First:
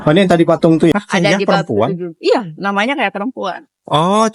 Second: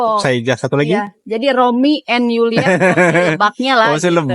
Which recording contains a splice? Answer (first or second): first